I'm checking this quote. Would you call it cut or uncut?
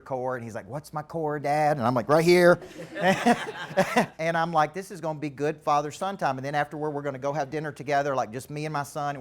cut